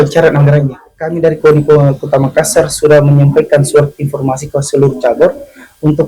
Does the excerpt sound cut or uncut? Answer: cut